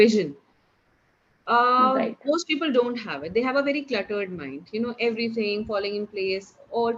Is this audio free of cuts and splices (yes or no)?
yes